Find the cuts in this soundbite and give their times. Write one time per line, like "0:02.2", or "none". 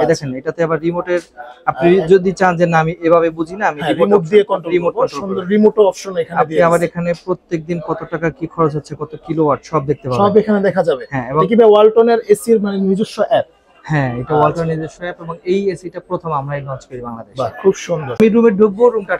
0:18.2